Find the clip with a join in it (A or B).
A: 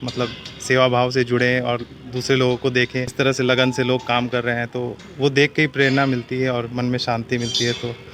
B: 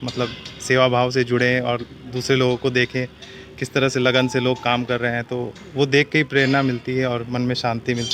A